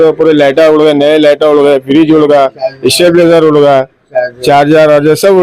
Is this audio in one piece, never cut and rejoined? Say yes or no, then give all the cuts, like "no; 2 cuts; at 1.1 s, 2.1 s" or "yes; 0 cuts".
yes; 0 cuts